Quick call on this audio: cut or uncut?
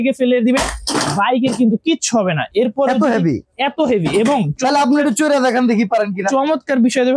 uncut